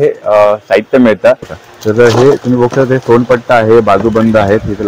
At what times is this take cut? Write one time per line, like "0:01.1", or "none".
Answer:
0:01.6